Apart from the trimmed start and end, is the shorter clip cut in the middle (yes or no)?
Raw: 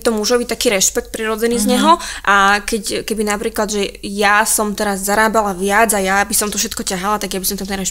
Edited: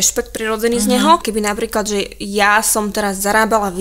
yes